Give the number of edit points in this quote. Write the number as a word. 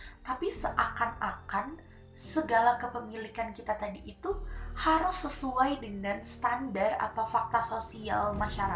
zero